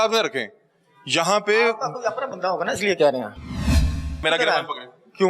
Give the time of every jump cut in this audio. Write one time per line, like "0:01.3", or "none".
0:04.2